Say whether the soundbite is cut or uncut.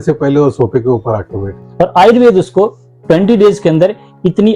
cut